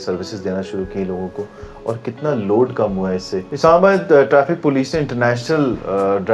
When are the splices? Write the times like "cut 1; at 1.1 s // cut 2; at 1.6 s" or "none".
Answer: cut 1; at 3.5 s